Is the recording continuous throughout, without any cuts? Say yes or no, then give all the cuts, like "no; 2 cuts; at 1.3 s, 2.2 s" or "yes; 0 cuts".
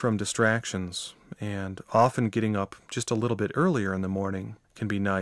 no; 1 cut; at 0.9 s